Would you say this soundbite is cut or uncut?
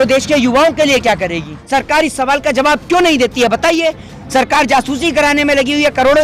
cut